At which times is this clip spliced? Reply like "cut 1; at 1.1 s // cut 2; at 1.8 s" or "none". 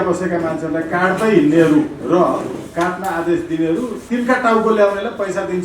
cut 1; at 2.0 s // cut 2; at 4.0 s